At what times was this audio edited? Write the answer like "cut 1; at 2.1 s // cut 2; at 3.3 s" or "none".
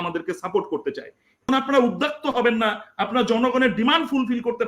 cut 1; at 1.5 s